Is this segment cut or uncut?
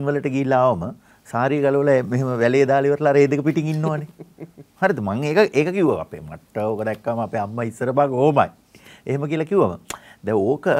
uncut